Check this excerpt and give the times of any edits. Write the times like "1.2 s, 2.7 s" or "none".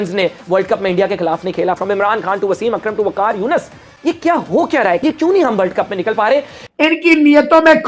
5.0 s, 6.6 s